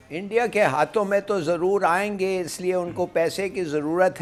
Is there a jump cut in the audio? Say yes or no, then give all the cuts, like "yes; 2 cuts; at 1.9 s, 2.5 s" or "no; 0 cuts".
no; 0 cuts